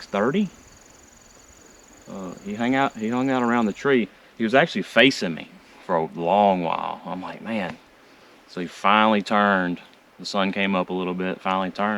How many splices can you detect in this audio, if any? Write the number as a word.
zero